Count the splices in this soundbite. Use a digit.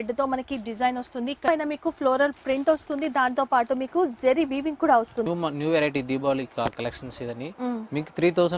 2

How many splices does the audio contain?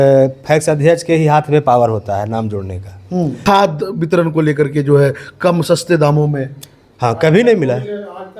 1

